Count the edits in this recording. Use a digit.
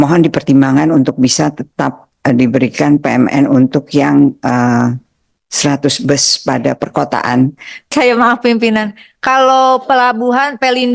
1